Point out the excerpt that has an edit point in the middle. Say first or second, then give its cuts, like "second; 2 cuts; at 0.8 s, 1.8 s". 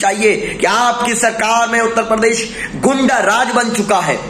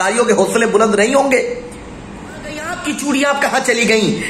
second; 1 cut; at 2.7 s